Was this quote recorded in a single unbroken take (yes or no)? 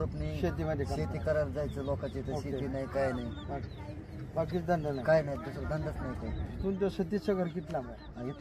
yes